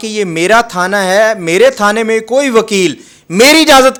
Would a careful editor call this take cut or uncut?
uncut